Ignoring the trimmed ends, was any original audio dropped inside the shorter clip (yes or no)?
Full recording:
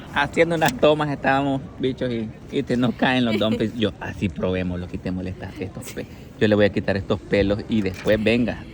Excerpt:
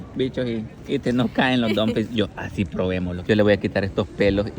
yes